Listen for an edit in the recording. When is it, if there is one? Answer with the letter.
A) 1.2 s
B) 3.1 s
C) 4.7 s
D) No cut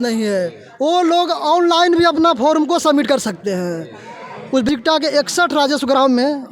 C